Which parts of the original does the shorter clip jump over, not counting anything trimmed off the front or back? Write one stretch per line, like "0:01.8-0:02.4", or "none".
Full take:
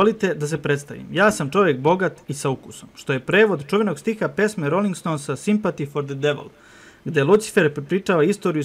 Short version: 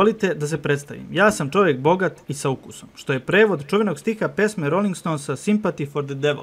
none